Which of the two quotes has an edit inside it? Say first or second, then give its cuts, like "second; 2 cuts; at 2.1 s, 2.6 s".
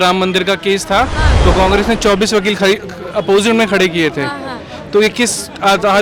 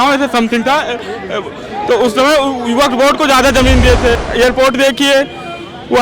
second; 1 cut; at 4.2 s